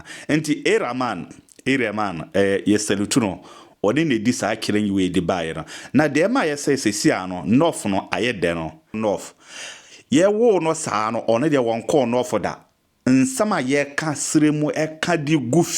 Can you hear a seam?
yes; 1 cut; at 8.9 s

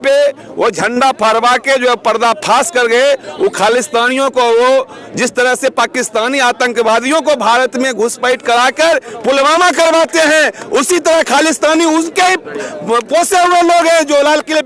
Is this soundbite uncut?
yes; 0 cuts

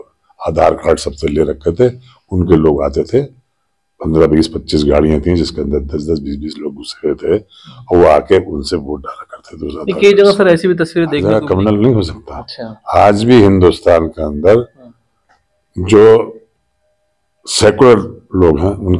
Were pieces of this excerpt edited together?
yes; 1 cut; at 11.1 s

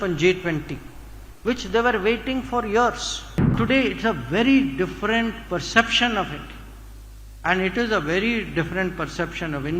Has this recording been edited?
yes; 1 cut; at 3.5 s

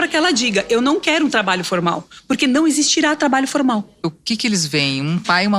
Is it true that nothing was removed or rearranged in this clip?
no; 1 cut; at 4.0 s

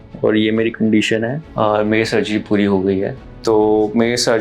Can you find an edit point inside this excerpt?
yes; 1 cut; at 3.3 s

